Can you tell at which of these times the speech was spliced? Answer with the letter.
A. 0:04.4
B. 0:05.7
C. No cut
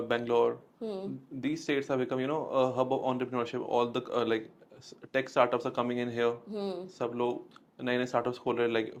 C